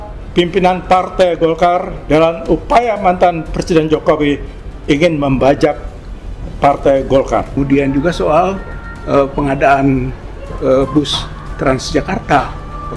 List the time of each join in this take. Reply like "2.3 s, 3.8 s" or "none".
7.6 s